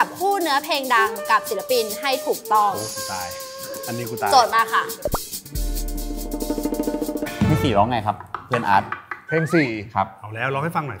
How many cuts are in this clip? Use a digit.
2